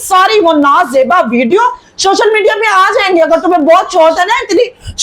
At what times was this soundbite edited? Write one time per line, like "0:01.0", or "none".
none